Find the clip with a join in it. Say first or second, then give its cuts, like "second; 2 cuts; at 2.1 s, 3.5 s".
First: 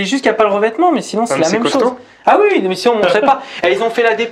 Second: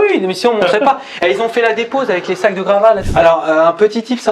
second; 1 cut; at 3.1 s